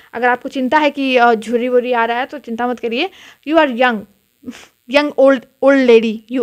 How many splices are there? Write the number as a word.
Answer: zero